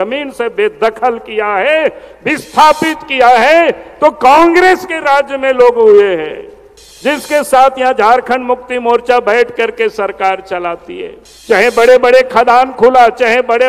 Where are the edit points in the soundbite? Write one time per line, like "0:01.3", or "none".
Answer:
none